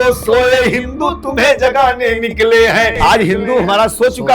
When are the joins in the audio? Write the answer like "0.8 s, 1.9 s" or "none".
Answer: 3.0 s